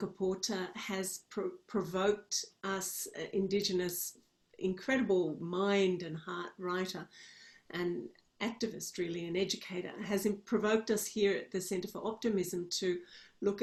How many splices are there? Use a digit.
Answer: 0